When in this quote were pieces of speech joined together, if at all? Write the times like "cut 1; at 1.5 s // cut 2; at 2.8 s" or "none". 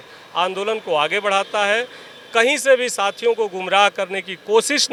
none